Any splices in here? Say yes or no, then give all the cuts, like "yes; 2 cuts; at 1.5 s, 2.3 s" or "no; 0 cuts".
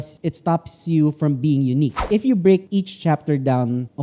yes; 1 cut; at 2.0 s